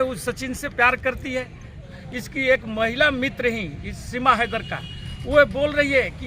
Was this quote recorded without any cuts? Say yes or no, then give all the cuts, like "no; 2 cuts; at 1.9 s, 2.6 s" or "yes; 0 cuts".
no; 1 cut; at 1.8 s